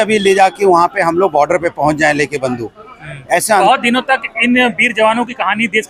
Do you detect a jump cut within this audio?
yes; 1 cut; at 3.6 s

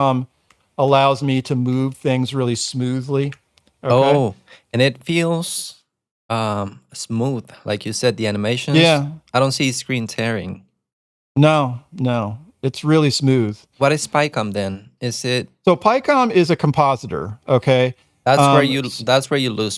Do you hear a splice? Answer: no; 0 cuts

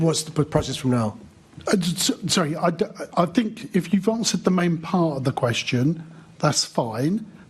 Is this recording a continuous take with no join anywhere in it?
no; 1 cut; at 6.2 s

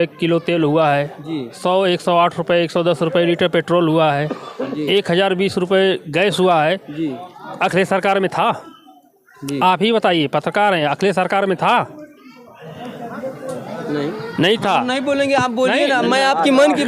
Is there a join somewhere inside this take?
no; 0 cuts

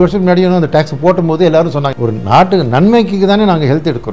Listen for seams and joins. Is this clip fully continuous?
no; 1 cut; at 1.9 s

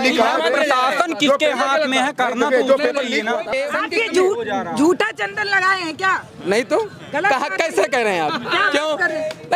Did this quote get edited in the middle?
yes; 1 cut; at 3.6 s

